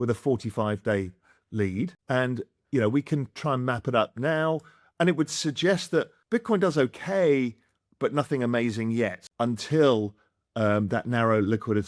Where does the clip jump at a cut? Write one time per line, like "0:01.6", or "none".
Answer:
0:02.0
0:06.2
0:09.2